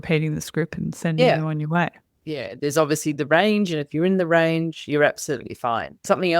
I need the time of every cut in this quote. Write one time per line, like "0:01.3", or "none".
0:02.0